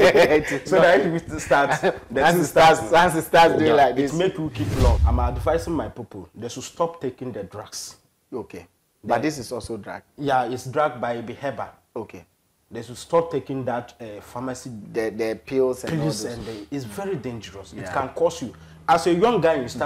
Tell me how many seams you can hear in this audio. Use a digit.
1